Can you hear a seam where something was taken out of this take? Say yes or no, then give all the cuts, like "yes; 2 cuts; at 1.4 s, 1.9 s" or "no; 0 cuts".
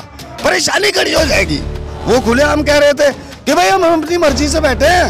yes; 1 cut; at 1.9 s